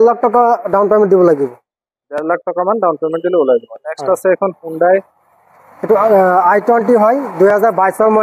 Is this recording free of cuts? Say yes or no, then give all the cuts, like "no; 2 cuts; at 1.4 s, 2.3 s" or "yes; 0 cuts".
yes; 0 cuts